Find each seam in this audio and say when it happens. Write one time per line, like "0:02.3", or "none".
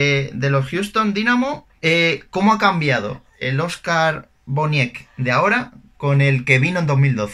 0:01.7